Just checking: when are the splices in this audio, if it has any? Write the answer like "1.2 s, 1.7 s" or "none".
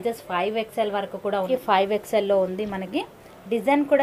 1.5 s